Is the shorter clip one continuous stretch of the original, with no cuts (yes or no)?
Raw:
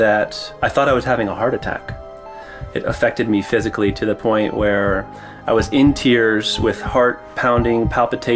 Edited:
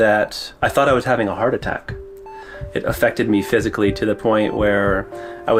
yes